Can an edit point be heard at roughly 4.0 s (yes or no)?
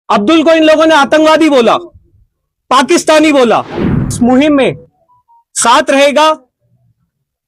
yes